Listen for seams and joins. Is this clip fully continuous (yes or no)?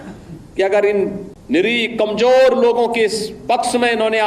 no